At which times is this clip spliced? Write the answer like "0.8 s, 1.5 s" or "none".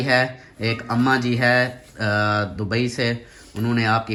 none